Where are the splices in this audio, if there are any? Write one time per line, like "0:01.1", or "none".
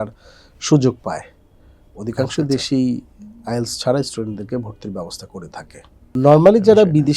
0:06.1